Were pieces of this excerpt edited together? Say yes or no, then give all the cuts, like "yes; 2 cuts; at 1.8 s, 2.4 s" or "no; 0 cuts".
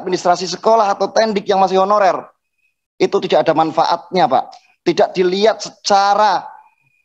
no; 0 cuts